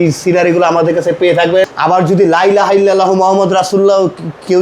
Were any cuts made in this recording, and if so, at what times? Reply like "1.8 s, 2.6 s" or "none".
1.7 s